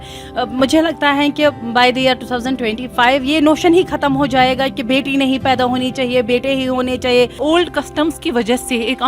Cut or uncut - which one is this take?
cut